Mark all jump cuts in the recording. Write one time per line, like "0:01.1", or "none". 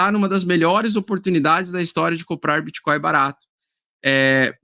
none